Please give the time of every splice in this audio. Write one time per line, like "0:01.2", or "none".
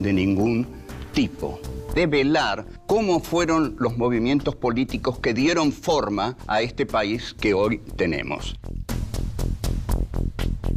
0:09.7